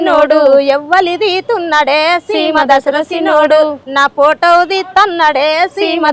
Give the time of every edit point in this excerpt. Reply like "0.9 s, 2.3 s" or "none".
3.8 s